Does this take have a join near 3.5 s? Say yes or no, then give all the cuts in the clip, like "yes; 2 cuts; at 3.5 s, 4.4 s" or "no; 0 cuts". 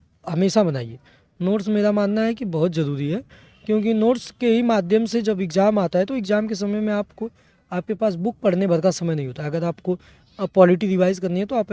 no; 0 cuts